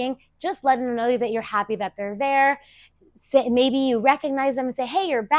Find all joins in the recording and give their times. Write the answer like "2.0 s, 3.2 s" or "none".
2.9 s